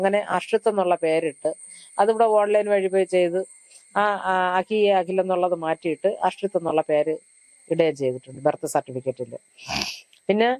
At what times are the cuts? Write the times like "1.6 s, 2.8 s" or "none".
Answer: none

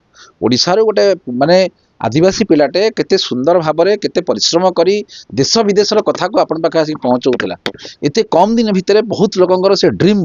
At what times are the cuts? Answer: none

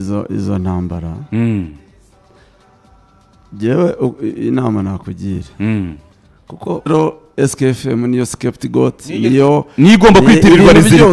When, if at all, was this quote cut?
6.9 s

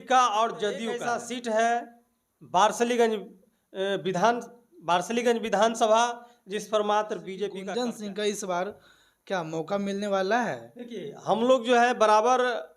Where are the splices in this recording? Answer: 1.0 s, 7.6 s

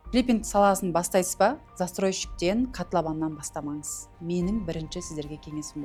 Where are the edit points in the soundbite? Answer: none

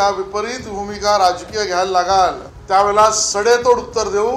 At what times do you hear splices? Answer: 2.5 s

